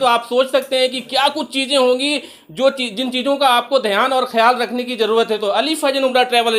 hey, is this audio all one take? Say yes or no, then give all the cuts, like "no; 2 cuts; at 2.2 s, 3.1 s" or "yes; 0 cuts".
yes; 0 cuts